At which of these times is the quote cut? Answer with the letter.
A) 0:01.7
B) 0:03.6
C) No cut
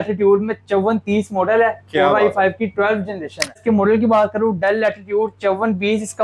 B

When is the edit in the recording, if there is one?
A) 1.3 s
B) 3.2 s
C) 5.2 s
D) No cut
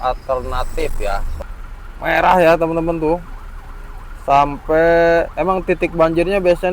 A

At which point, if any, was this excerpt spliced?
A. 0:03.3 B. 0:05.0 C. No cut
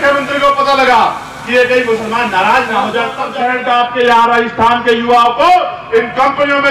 A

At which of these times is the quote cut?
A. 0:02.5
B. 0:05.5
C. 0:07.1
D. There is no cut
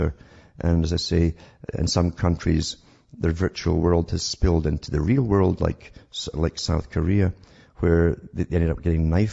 D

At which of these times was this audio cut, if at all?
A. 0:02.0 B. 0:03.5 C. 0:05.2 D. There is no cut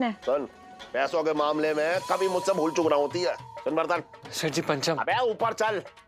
B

